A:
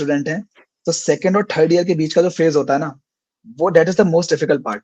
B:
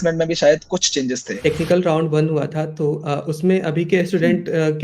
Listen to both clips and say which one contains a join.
B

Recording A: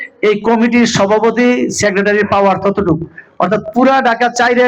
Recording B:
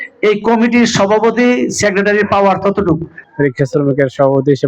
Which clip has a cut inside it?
B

